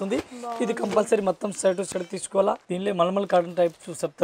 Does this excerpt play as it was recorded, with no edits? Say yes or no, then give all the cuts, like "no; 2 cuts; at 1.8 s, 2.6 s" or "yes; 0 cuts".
no; 1 cut; at 2.7 s